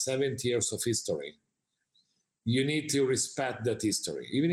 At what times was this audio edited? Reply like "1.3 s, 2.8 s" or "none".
none